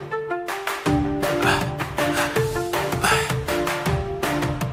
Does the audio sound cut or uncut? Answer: uncut